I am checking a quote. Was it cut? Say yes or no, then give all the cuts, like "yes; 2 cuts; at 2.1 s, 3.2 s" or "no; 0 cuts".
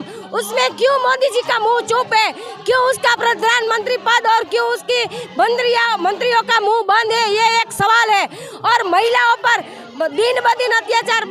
no; 0 cuts